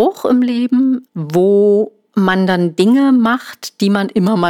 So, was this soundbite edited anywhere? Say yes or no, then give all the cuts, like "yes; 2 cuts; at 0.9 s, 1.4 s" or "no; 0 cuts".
yes; 2 cuts; at 1.1 s, 2.0 s